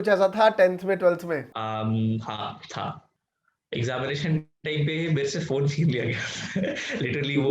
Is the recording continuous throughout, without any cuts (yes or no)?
no